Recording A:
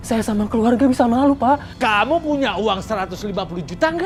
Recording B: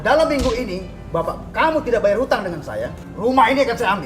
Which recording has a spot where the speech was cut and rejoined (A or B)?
B